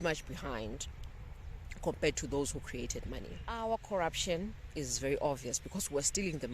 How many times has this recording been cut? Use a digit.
1